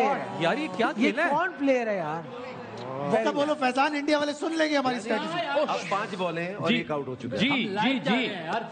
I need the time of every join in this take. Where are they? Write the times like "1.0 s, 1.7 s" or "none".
3.1 s